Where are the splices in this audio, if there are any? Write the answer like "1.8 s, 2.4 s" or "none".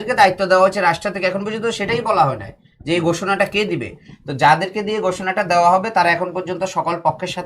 none